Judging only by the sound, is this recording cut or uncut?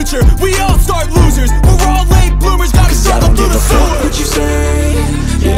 uncut